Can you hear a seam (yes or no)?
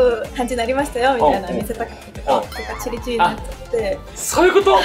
no